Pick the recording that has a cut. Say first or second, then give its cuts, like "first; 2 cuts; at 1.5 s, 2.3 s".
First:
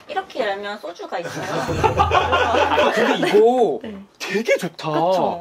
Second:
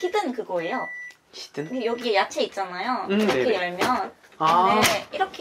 first; 1 cut; at 2.8 s